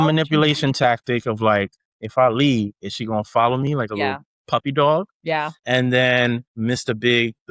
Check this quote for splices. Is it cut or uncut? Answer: cut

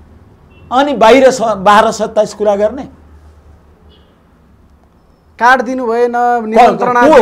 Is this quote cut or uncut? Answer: uncut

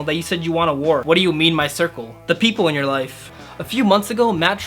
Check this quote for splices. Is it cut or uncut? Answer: cut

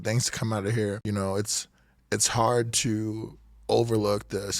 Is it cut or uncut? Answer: cut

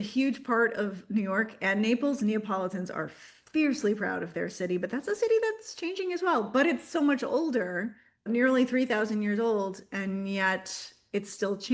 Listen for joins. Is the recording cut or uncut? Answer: uncut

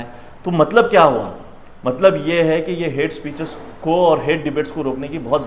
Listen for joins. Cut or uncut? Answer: uncut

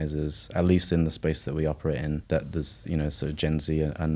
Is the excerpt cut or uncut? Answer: cut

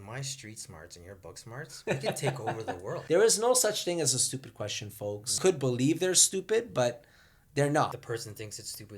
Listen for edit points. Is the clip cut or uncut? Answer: cut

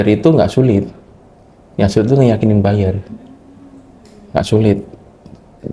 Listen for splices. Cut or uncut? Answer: uncut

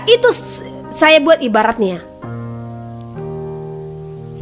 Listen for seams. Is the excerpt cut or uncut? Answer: uncut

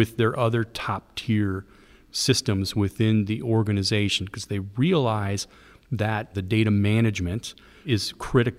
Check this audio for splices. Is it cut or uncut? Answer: cut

